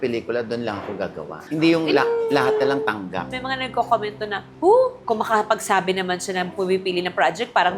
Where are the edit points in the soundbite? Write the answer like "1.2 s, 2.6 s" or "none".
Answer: 3.2 s